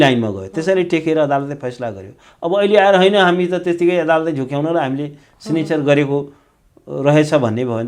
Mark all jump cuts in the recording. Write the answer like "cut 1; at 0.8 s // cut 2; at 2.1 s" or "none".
none